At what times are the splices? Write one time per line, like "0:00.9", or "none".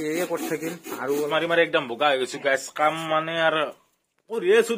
0:01.3